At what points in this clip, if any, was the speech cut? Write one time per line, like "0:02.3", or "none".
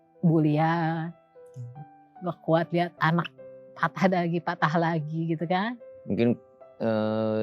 0:05.9